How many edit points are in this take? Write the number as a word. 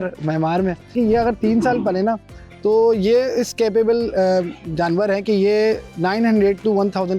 one